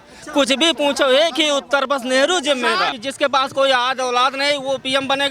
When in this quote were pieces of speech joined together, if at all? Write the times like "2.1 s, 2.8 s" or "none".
3.0 s